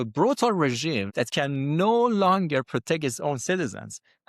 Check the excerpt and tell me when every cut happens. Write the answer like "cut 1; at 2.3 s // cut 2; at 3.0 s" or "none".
cut 1; at 1.1 s